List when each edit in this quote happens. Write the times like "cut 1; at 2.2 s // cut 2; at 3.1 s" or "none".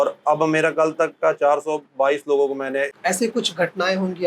cut 1; at 2.9 s

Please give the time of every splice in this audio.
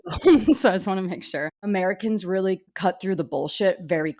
cut 1; at 1.6 s

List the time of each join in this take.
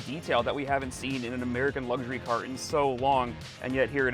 none

